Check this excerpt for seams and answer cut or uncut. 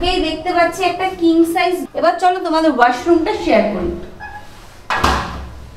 cut